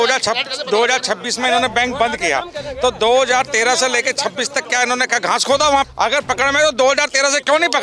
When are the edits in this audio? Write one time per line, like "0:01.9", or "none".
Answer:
0:05.9